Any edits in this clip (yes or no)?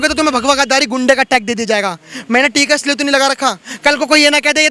no